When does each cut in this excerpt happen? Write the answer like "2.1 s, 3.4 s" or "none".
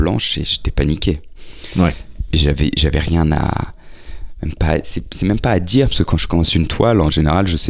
none